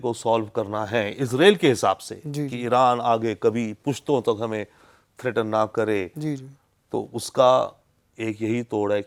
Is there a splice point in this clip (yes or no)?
no